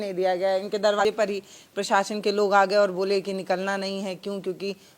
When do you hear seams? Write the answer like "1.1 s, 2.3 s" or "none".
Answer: 1.0 s